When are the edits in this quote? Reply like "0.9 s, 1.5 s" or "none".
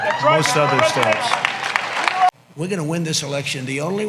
2.3 s